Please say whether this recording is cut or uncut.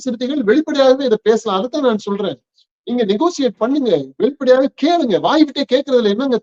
uncut